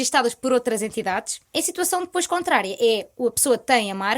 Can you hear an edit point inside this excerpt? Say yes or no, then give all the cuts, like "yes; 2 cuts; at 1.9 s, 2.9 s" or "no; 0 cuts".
yes; 1 cut; at 1.4 s